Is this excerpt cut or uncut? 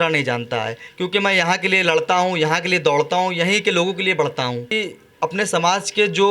cut